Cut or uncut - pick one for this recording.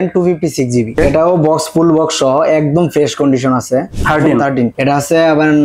cut